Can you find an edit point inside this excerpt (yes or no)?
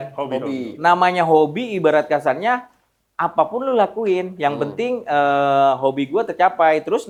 no